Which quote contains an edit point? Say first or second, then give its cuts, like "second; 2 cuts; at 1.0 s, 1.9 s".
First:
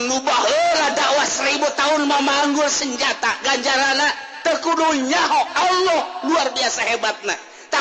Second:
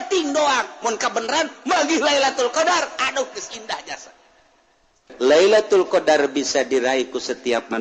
second; 1 cut; at 5.0 s